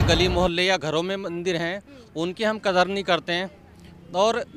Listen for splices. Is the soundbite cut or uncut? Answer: uncut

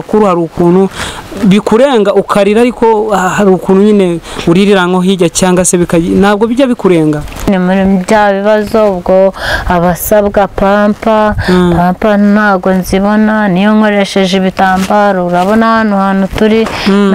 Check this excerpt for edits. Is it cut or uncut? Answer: cut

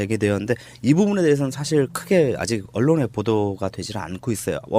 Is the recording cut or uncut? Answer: uncut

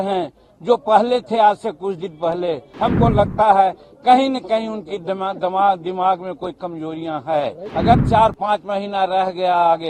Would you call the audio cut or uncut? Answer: cut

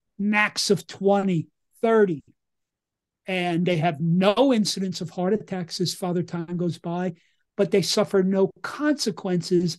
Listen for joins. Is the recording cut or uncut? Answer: uncut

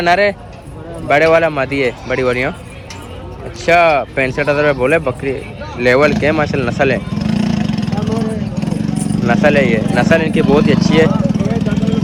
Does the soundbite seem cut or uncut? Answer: uncut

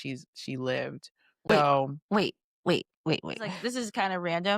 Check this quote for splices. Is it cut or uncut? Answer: cut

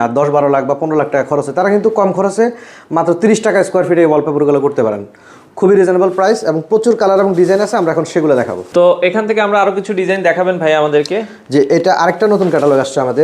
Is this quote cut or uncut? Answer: uncut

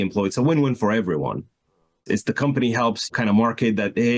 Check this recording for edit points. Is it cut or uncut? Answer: cut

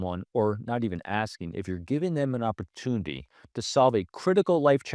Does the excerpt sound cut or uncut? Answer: uncut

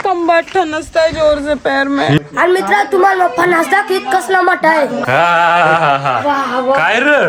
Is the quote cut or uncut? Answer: cut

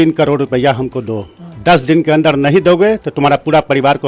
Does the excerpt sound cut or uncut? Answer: uncut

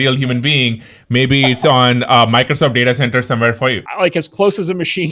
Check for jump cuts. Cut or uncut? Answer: cut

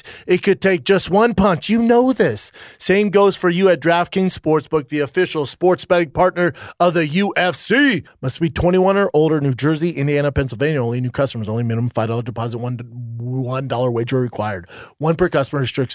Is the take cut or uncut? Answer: cut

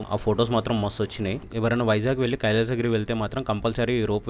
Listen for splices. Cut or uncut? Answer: cut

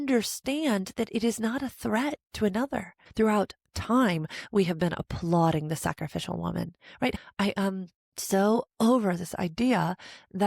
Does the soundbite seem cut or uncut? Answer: cut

